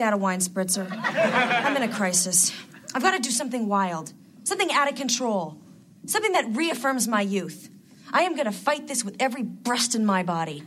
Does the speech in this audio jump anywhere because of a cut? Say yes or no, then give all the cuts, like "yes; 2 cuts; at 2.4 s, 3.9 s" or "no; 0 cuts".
yes; 1 cut; at 1.5 s